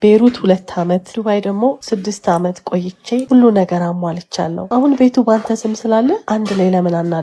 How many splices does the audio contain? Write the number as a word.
five